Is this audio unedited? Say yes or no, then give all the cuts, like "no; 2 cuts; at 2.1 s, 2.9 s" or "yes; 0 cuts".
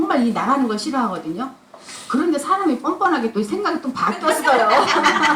yes; 0 cuts